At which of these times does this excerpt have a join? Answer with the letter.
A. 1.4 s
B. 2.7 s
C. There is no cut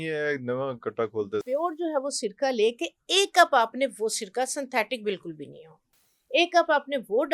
A